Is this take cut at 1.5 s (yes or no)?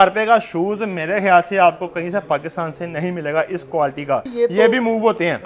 no